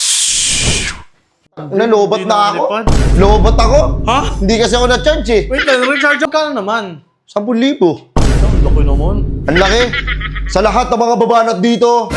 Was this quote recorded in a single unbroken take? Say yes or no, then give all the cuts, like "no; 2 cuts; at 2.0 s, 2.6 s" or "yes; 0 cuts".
no; 1 cut; at 6.3 s